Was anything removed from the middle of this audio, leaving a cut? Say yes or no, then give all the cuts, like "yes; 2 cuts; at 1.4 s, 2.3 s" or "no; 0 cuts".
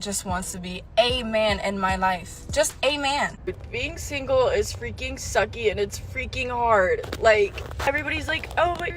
yes; 2 cuts; at 3.4 s, 7.9 s